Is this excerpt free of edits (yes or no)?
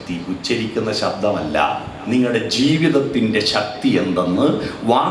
no